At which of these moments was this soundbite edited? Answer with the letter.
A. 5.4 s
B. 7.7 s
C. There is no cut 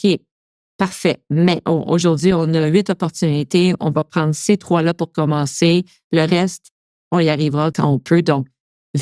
B